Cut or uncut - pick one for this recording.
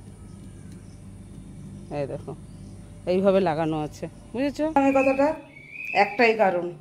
cut